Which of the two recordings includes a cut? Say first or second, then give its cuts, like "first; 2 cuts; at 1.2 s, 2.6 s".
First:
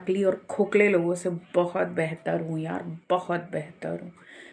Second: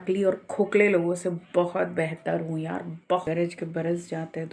second; 1 cut; at 3.2 s